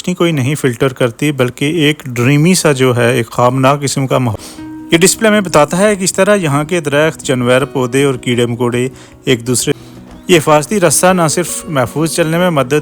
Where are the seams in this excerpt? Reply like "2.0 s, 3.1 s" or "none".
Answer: 4.3 s, 9.8 s